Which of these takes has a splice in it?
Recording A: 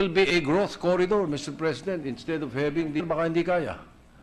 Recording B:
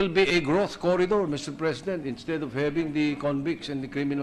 B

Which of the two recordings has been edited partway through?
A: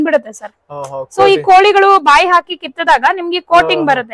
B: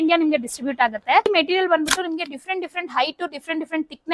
B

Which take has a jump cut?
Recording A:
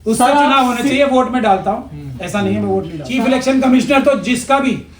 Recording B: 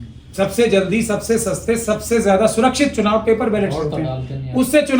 A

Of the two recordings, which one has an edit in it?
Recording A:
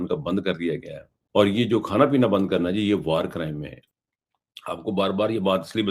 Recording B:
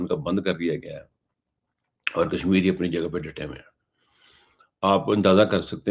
A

